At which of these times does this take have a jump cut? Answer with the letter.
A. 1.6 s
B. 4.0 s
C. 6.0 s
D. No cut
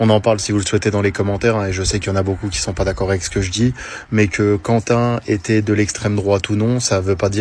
D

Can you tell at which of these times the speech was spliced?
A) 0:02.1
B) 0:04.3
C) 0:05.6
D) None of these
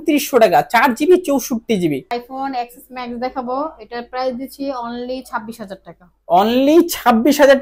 A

